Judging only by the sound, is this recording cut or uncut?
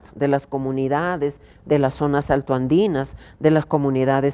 uncut